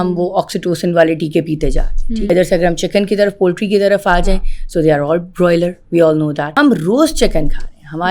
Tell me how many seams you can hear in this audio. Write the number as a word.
two